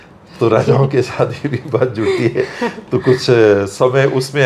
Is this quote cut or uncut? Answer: uncut